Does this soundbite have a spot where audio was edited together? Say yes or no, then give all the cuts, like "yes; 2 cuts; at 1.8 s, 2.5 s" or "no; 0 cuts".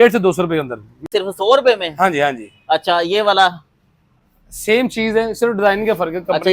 yes; 1 cut; at 1.0 s